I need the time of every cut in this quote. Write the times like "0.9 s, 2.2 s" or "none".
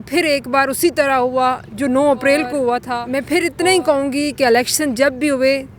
3.0 s